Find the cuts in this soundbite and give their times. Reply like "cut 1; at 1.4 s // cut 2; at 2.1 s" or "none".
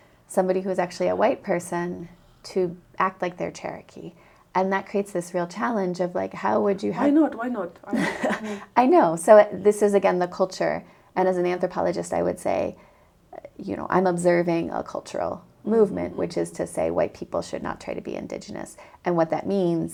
none